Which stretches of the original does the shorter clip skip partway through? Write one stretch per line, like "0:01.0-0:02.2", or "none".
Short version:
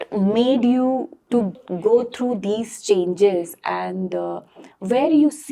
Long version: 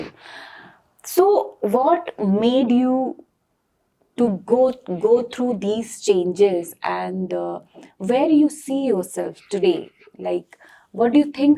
0:03.7-0:04.9